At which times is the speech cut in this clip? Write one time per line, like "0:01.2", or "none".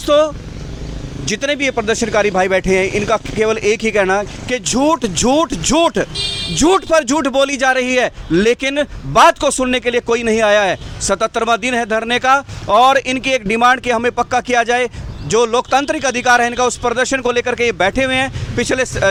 none

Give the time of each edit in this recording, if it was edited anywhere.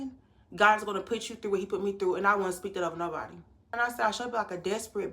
0:03.8

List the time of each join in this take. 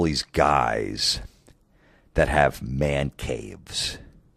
none

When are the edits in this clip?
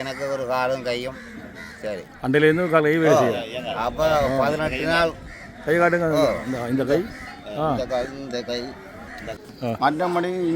0:09.3

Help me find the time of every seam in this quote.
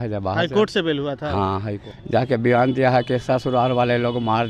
0:01.9

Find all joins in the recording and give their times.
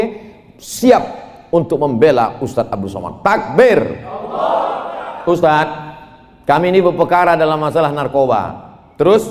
0:04.9

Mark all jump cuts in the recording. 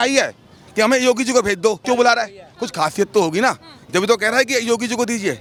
none

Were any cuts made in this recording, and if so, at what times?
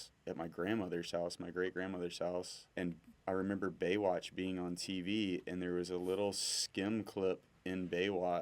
0:02.6

